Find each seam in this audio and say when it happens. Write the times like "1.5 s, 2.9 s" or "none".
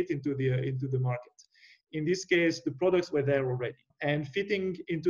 3.9 s